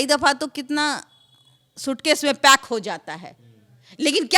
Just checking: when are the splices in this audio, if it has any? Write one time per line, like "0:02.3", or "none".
none